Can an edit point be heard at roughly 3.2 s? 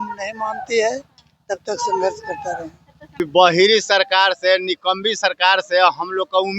yes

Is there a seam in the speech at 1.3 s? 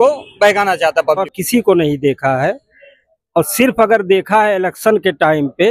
yes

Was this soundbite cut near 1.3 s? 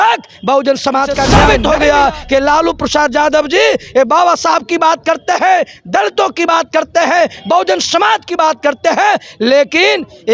yes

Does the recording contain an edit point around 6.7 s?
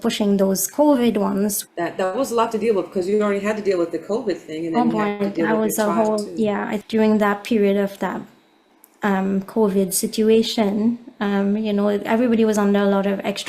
yes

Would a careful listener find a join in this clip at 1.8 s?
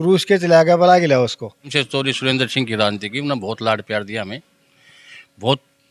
yes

